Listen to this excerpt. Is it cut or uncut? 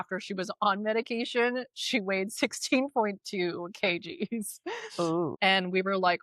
cut